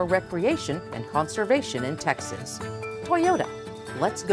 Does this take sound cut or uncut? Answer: uncut